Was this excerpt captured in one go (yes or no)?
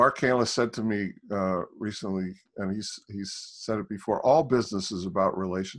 yes